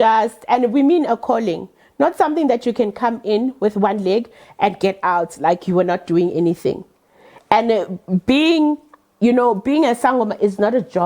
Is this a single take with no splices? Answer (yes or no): yes